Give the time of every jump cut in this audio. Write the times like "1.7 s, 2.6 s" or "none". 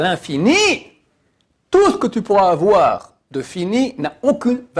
none